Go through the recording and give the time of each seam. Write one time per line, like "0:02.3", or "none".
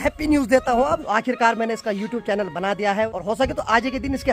0:01.1
0:03.1